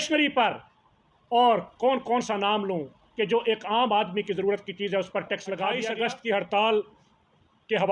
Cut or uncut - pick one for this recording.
cut